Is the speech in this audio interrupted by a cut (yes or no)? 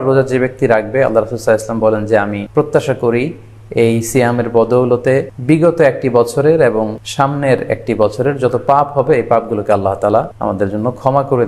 yes